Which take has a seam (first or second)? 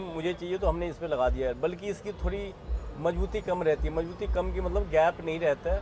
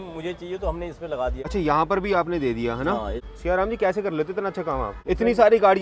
second